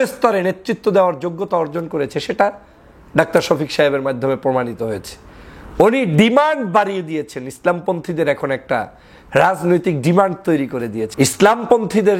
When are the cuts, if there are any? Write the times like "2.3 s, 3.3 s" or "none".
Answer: 11.0 s